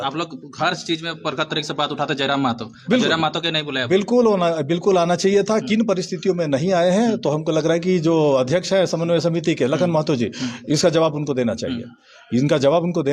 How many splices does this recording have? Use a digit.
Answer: 0